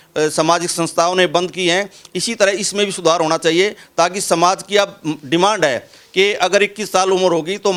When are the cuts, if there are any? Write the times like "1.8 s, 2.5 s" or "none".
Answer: none